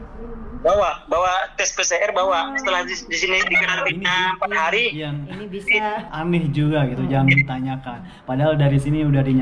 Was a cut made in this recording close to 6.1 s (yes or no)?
yes